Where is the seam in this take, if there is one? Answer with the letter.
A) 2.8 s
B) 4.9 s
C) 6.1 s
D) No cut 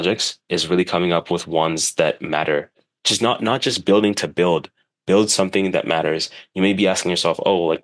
A